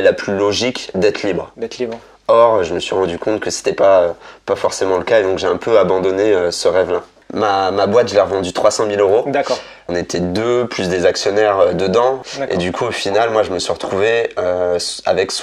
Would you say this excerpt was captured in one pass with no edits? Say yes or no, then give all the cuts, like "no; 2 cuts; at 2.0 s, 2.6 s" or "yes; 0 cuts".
no; 3 cuts; at 7.2 s, 9.9 s, 12.3 s